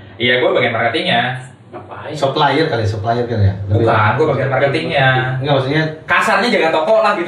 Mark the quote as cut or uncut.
uncut